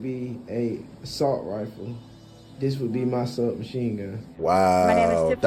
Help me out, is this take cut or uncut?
uncut